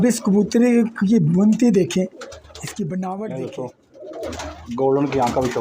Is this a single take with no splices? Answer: no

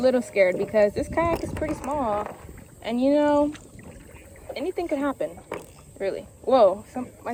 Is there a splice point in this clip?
no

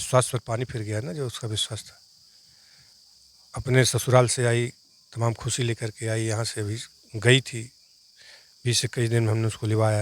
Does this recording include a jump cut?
no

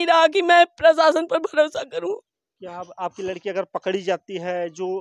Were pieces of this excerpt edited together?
no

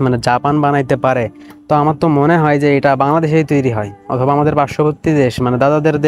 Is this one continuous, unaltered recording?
yes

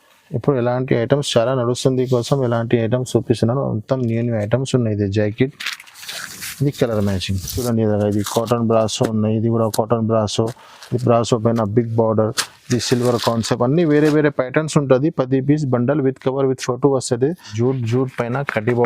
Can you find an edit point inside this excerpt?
yes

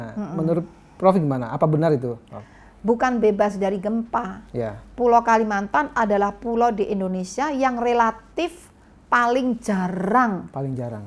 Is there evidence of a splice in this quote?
no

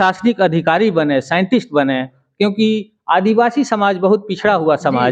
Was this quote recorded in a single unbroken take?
yes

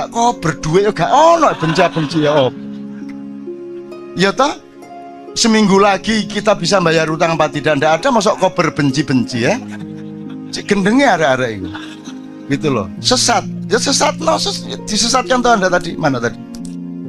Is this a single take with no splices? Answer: no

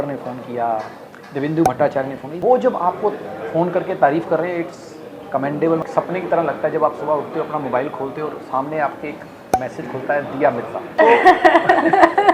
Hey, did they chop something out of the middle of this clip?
yes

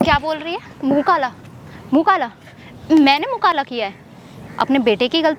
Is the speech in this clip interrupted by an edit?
no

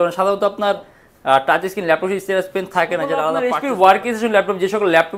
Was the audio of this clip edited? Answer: yes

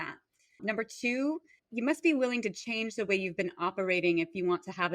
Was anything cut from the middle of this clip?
yes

